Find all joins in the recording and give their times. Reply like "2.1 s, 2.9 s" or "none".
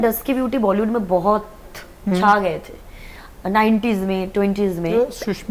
none